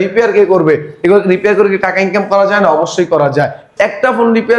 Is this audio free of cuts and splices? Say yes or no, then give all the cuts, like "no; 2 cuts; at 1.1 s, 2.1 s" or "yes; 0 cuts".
no; 1 cut; at 3.6 s